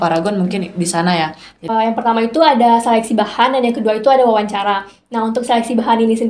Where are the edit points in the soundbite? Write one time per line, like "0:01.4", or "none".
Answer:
0:01.7